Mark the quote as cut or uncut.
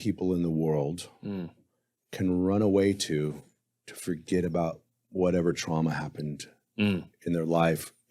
uncut